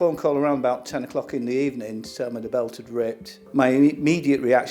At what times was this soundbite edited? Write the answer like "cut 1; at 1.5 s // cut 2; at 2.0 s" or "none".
none